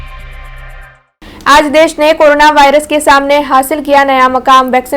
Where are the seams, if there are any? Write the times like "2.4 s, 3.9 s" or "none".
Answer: 1.0 s